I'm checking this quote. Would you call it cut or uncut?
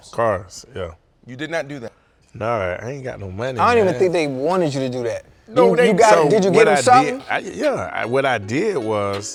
uncut